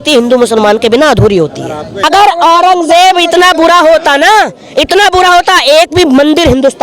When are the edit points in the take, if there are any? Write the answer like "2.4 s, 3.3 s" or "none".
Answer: 2.0 s